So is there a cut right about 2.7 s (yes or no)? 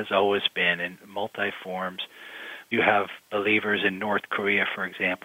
yes